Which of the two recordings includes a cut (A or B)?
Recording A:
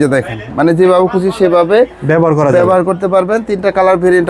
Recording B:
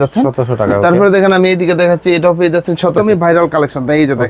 B